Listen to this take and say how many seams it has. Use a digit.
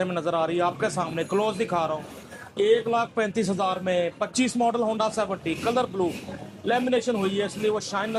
0